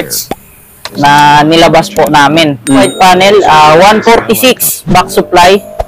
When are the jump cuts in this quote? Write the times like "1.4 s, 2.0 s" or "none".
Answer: 2.8 s